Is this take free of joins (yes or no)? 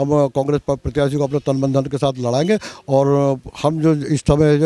yes